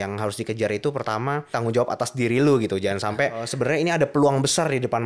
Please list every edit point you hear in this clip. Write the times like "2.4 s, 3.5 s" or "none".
1.5 s, 3.5 s